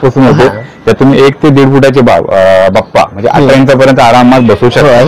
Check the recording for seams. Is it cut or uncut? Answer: uncut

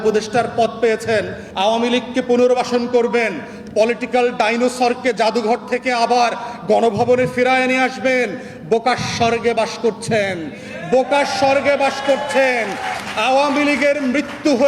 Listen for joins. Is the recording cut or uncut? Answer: cut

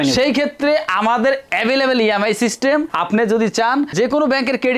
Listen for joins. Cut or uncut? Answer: uncut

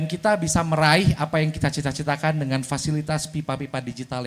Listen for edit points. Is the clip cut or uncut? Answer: uncut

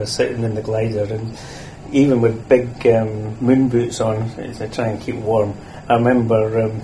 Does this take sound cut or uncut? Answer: uncut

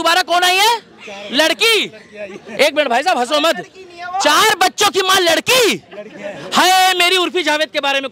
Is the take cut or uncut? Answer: uncut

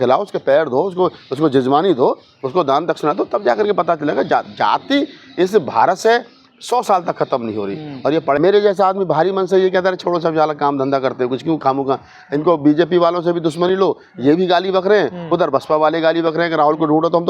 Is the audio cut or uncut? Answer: cut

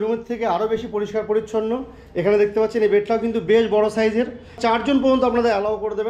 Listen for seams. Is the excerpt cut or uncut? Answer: cut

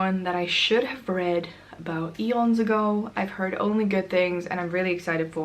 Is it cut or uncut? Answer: uncut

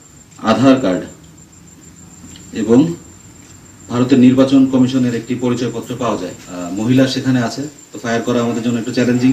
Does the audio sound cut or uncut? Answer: cut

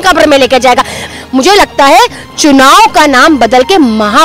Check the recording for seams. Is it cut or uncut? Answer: cut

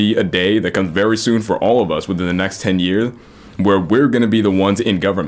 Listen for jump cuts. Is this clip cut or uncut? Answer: uncut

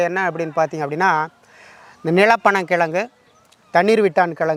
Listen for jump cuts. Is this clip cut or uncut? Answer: uncut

